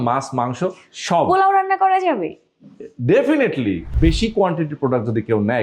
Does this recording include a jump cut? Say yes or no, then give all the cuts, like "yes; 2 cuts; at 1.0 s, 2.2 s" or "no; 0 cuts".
yes; 1 cut; at 3.9 s